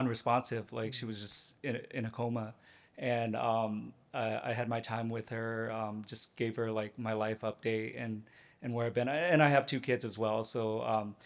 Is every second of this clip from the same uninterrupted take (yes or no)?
yes